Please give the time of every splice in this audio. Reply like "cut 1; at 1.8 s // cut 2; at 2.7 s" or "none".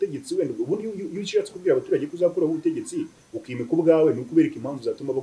none

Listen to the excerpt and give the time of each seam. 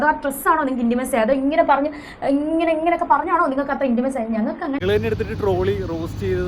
cut 1; at 4.8 s

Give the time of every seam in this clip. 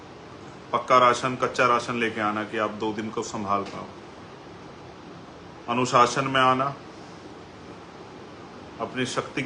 none

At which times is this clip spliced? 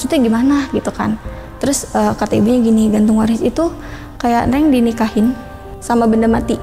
cut 1; at 5.7 s

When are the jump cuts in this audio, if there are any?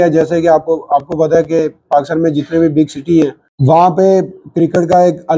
cut 1; at 3.5 s

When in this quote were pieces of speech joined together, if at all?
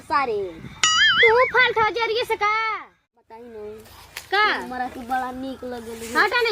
cut 1; at 2.6 s

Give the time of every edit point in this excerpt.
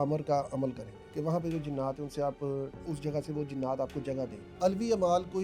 cut 1; at 0.9 s // cut 2; at 2.8 s // cut 3; at 4.6 s

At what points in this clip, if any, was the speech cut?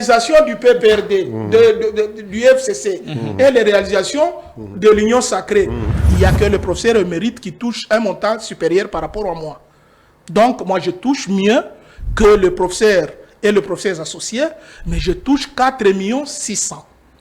cut 1; at 5.8 s

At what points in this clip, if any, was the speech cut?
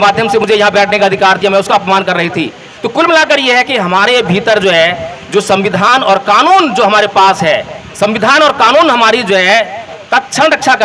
cut 1; at 9.9 s

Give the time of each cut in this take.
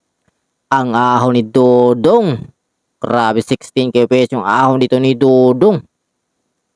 none

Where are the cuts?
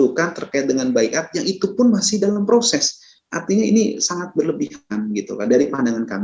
none

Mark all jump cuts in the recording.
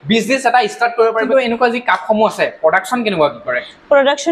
cut 1; at 1.2 s

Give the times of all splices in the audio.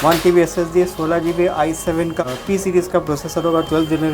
cut 1; at 2.2 s

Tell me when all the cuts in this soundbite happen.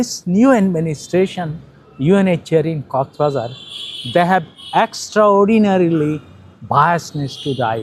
none

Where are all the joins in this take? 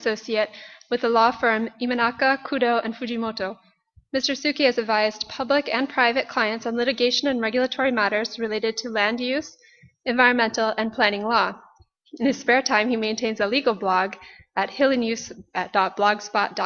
cut 1; at 7.0 s

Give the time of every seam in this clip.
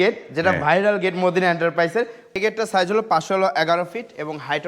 cut 1; at 2.3 s

